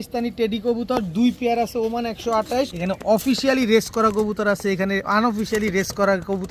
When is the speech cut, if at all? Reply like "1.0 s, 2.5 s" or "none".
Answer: 2.8 s

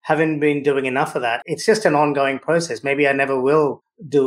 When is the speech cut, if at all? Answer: 1.4 s

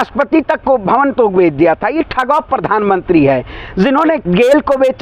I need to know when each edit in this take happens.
none

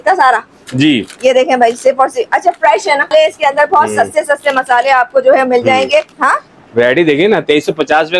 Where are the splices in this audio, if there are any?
3.1 s, 6.1 s

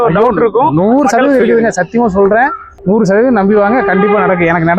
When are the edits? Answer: 2.7 s

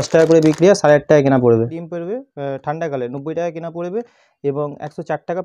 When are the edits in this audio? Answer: 1.7 s

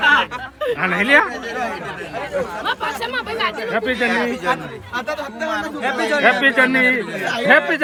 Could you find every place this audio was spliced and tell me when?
none

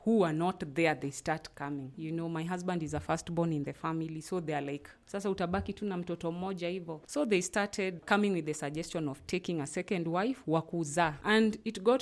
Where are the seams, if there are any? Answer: 1.9 s, 7.0 s, 8.0 s, 11.2 s

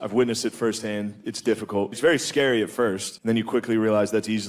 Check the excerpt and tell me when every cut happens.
2.0 s, 3.1 s

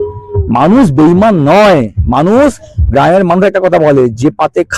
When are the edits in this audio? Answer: none

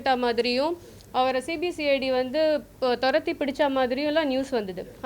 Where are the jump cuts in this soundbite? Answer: none

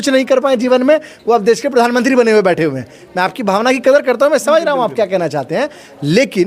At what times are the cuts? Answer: none

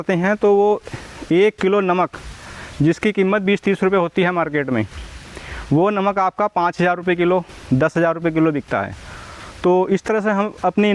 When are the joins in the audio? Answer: none

